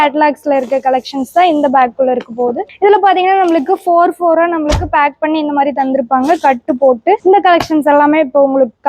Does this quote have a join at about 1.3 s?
no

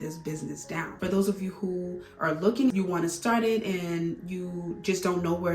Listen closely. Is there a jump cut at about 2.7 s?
yes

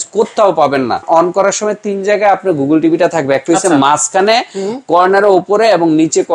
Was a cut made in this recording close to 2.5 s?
no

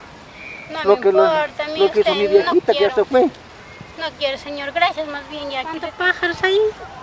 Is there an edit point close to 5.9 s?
yes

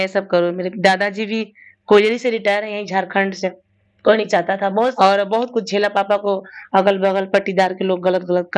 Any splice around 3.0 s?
no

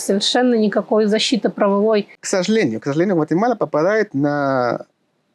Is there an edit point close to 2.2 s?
yes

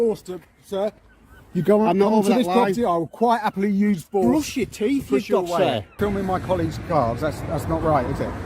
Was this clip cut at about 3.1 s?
no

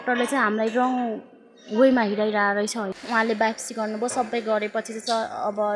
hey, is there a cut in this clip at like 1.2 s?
no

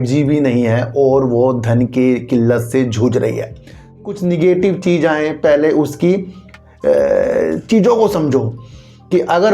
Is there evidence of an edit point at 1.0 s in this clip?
no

